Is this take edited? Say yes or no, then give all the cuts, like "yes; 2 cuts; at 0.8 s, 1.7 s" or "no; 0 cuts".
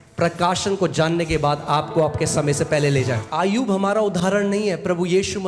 yes; 1 cut; at 3.3 s